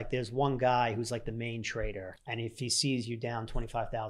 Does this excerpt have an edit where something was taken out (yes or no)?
yes